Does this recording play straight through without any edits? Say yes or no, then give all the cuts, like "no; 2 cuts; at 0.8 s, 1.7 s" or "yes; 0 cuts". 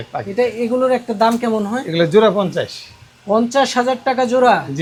yes; 0 cuts